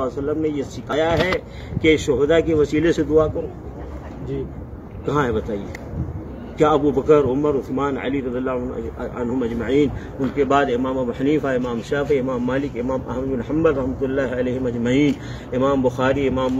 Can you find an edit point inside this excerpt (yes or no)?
yes